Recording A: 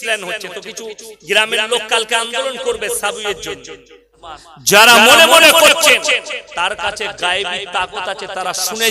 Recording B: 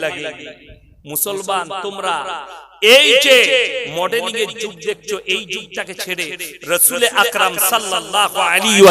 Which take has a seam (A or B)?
A